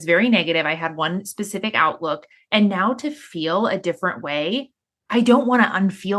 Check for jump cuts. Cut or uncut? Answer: cut